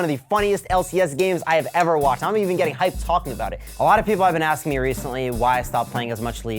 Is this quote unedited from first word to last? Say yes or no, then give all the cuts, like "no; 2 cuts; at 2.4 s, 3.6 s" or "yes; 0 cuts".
no; 1 cut; at 3.6 s